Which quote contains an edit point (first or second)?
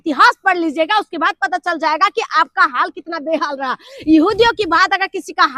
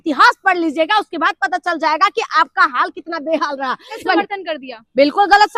second